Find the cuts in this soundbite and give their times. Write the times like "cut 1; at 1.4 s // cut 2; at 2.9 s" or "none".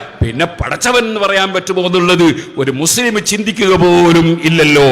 none